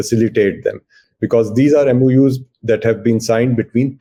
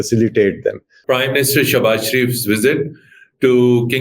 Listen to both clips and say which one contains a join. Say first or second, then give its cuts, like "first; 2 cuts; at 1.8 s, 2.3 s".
second; 1 cut; at 0.9 s